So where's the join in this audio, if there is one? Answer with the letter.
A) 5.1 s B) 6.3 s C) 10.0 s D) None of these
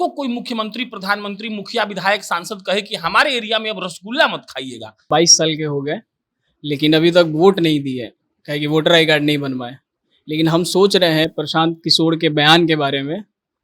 A